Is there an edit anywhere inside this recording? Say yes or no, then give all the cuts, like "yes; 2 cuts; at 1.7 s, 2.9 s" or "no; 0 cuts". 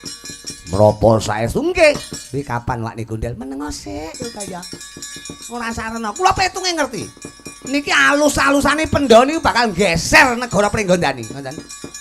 no; 0 cuts